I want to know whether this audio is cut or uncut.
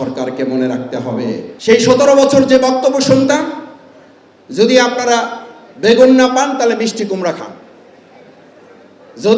cut